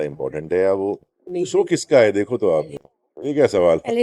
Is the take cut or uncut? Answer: cut